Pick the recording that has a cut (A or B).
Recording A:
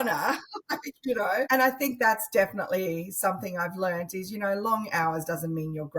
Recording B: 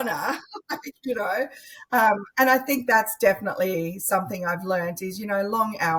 A